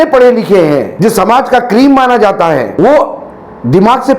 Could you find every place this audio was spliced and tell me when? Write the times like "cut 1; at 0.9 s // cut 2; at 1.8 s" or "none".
cut 1; at 0.9 s // cut 2; at 2.7 s